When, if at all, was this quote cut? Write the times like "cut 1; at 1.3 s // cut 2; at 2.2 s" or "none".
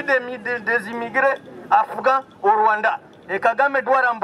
none